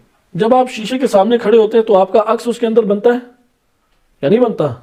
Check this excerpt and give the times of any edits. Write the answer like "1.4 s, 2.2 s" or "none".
none